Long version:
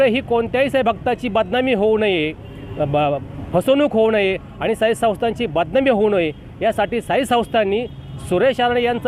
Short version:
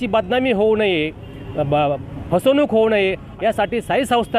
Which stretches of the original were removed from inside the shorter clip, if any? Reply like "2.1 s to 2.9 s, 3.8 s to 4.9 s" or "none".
4.5 s to 6.5 s